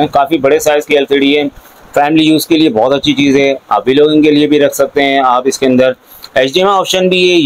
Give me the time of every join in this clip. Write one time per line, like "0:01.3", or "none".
none